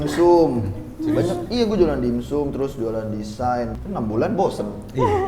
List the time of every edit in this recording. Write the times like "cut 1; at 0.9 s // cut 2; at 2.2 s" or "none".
cut 1; at 3.7 s